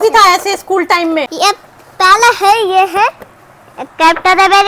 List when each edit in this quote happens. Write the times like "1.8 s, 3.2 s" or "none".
1.3 s